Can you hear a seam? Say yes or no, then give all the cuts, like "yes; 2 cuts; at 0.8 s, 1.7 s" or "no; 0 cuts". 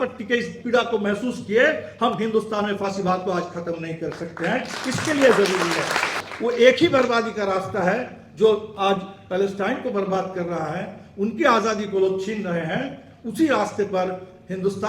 yes; 1 cut; at 6.2 s